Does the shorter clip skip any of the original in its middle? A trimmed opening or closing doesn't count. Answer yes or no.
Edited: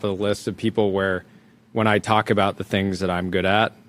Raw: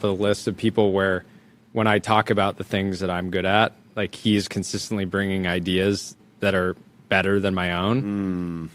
no